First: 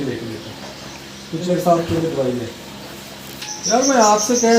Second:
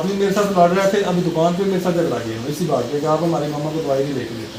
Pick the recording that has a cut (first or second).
first